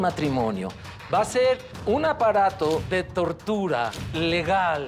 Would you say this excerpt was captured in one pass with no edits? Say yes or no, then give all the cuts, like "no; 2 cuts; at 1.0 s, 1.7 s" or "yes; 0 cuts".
no; 3 cuts; at 1.7 s, 2.8 s, 4.0 s